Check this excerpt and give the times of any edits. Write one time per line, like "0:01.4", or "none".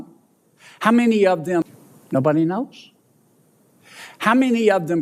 0:01.6